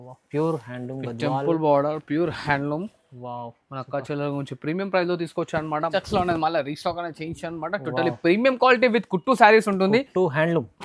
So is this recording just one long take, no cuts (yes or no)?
no